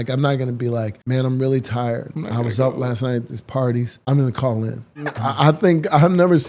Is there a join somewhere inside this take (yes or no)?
yes